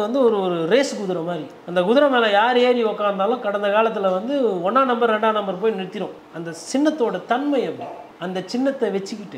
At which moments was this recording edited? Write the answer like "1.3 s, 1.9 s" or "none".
none